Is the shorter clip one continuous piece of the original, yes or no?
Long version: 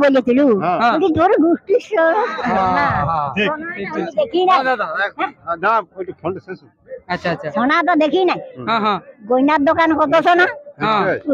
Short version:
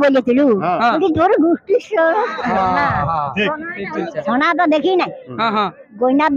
no